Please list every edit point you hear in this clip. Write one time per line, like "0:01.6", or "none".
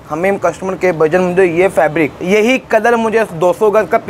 0:02.2